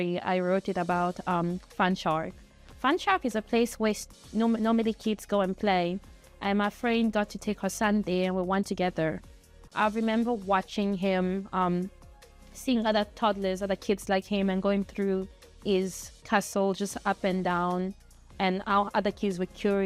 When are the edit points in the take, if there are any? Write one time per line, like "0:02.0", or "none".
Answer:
none